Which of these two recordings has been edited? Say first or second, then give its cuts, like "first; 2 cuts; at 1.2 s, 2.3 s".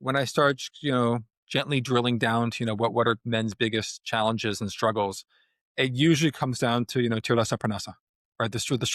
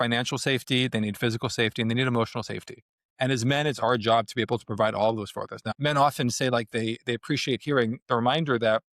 second; 1 cut; at 5.6 s